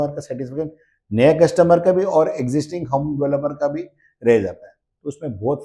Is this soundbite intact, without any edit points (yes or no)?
yes